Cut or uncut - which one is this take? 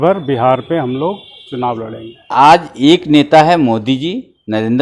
cut